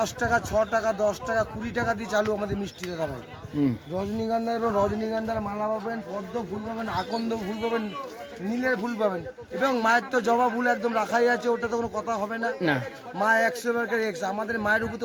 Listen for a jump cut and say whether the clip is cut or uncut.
uncut